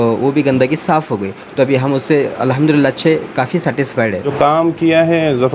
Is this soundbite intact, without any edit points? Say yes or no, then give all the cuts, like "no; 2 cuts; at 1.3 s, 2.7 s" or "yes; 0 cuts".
no; 1 cut; at 4.3 s